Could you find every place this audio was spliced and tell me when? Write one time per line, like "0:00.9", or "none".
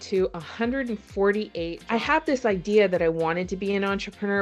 0:01.8